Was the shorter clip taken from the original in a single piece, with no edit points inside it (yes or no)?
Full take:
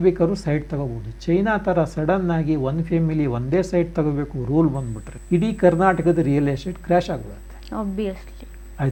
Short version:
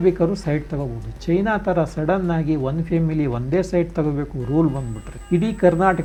yes